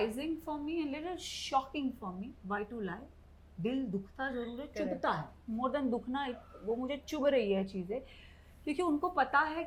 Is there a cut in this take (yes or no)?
no